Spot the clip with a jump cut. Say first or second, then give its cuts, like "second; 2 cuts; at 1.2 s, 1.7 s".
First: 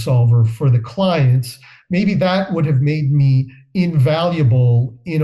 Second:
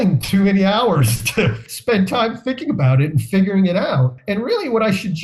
second; 2 cuts; at 1.6 s, 4.2 s